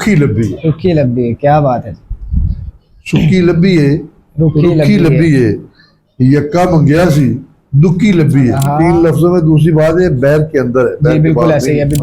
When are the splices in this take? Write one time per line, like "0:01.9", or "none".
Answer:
0:08.7